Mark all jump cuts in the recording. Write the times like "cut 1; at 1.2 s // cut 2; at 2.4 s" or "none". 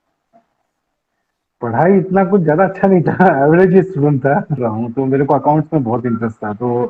cut 1; at 4.6 s